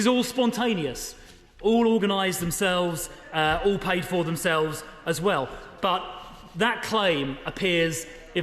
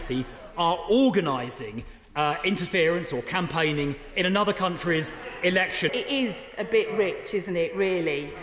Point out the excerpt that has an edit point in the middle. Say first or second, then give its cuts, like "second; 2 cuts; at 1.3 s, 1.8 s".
second; 1 cut; at 5.9 s